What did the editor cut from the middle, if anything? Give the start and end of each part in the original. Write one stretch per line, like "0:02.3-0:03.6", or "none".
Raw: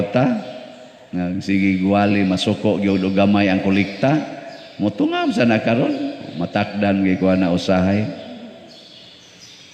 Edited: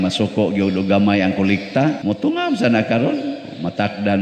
0:04.3-0:04.8